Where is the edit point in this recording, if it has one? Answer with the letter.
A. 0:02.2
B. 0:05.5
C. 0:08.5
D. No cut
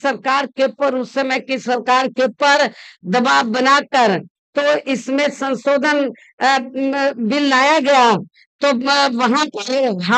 D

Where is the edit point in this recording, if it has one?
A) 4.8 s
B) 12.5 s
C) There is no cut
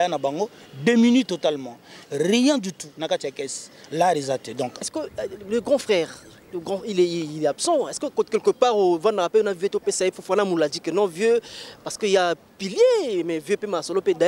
A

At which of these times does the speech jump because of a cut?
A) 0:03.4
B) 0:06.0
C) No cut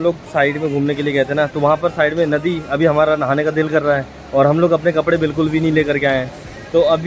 C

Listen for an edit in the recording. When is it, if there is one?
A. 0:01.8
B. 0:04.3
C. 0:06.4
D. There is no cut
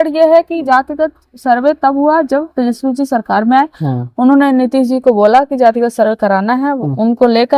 D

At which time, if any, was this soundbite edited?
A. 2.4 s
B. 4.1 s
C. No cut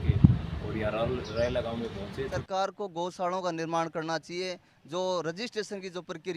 A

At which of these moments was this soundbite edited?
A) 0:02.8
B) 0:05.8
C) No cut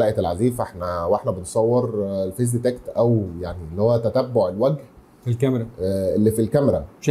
C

